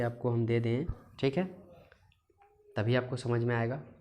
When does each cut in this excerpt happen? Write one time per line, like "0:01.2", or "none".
0:01.0